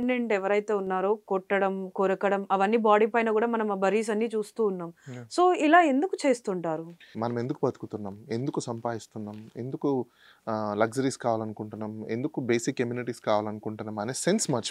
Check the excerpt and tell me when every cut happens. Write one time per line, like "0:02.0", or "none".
0:07.1